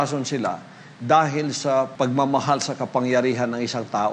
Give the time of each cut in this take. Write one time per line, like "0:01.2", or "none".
0:01.9

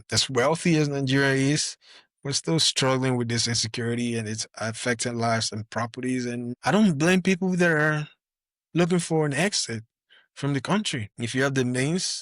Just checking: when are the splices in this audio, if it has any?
0:11.1

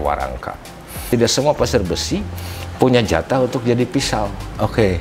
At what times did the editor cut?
0:01.0

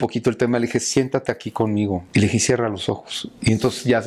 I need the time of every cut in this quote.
0:02.0

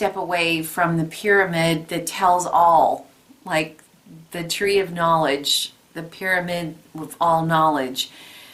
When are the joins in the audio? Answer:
none

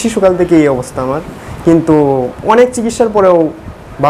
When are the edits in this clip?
none

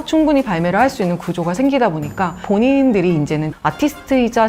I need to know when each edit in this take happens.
0:02.4

